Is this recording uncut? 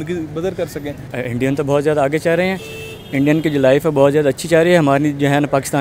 no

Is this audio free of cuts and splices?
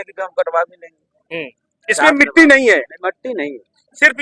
yes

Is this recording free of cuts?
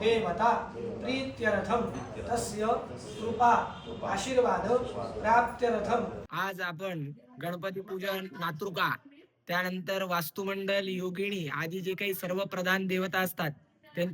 no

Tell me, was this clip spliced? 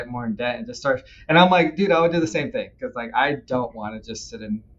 yes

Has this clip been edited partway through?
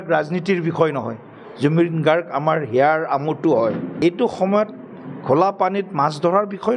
yes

